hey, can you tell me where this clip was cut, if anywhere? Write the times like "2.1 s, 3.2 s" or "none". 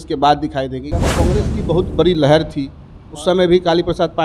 1.2 s